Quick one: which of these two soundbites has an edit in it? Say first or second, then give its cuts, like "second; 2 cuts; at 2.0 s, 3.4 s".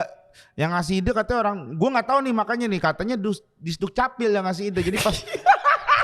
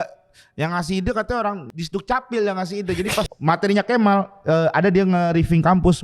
second; 2 cuts; at 1.7 s, 3.3 s